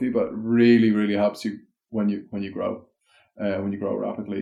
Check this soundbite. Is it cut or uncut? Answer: uncut